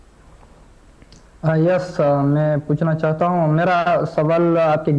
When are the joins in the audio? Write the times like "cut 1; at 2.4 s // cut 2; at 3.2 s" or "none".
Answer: none